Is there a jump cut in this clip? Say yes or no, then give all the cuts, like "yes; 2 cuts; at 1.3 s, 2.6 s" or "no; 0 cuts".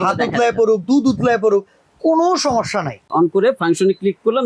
yes; 1 cut; at 3.0 s